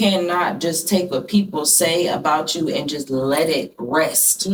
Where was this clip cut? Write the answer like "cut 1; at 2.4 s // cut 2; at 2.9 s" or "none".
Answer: none